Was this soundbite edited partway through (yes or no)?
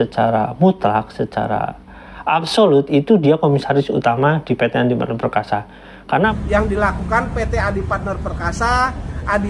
yes